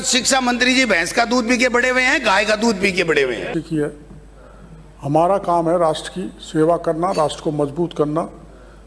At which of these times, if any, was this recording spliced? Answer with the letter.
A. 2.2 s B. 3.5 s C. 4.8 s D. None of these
B